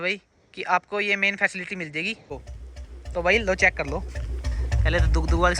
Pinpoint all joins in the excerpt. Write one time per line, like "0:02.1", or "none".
0:02.3